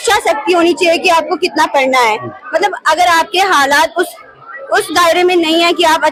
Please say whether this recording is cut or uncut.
uncut